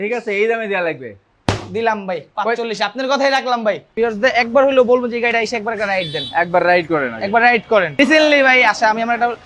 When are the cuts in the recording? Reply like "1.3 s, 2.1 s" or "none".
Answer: 3.9 s, 8.0 s